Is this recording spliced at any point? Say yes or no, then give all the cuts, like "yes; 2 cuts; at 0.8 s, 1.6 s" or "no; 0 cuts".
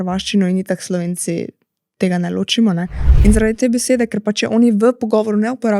yes; 1 cut; at 3.0 s